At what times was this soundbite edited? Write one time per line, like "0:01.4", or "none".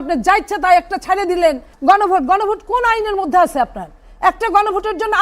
0:01.7